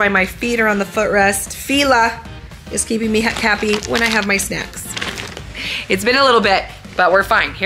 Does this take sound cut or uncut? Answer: uncut